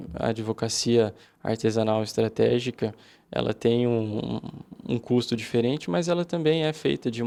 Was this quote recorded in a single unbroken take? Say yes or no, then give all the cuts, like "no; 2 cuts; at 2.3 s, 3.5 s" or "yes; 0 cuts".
yes; 0 cuts